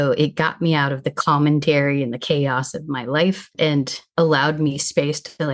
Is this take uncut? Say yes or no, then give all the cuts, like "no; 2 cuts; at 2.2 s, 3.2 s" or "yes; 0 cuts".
no; 1 cut; at 3.8 s